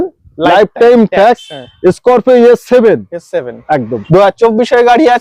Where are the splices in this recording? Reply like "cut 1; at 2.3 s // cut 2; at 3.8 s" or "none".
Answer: cut 1; at 3.9 s

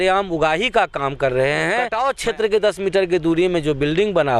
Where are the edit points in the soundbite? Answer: cut 1; at 1.9 s

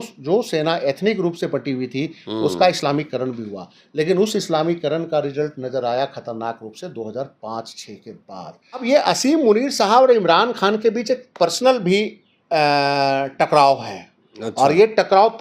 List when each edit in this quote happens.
cut 1; at 8.8 s

